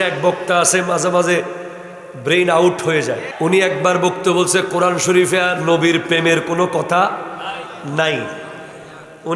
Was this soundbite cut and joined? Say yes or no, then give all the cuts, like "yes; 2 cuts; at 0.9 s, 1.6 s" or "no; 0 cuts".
yes; 1 cut; at 3.3 s